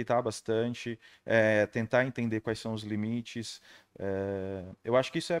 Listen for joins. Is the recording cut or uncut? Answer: uncut